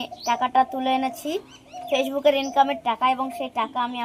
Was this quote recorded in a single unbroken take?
yes; 0 cuts

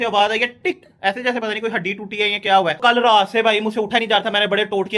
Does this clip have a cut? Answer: no; 0 cuts

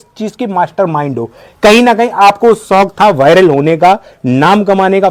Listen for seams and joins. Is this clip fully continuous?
yes; 0 cuts

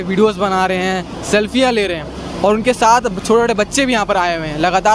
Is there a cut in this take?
no; 0 cuts

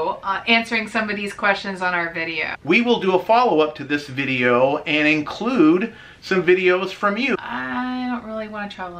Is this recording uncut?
no; 2 cuts; at 2.6 s, 7.3 s

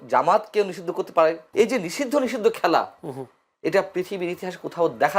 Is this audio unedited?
no; 1 cut; at 1.4 s

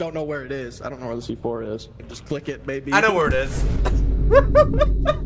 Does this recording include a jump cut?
yes; 1 cut; at 2.1 s

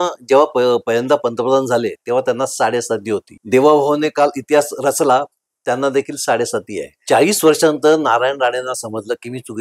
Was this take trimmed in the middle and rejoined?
yes; 2 cuts; at 3.3 s, 6.9 s

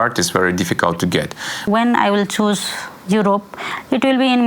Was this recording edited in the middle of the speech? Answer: yes; 1 cut; at 1.7 s

